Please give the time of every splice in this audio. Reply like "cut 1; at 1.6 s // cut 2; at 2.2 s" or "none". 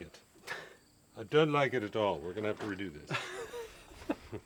none